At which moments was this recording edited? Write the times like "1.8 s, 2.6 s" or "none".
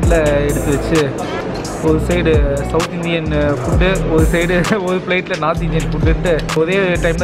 none